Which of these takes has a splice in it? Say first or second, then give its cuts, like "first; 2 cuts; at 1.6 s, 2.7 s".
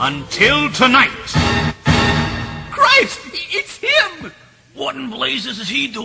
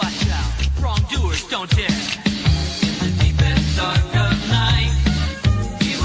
first; 1 cut; at 3.2 s